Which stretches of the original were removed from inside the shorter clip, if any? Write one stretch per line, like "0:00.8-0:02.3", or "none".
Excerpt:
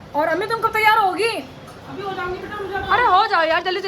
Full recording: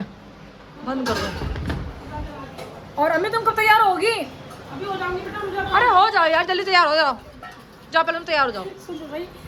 none